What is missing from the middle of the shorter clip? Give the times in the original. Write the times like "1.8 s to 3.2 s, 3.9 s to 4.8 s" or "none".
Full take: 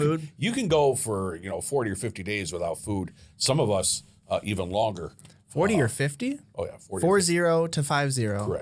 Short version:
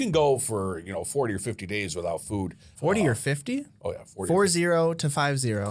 3.2 s to 5.4 s